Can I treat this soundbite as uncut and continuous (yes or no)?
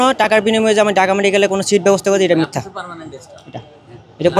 yes